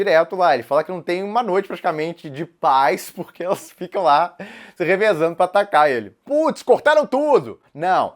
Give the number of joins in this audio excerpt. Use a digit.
1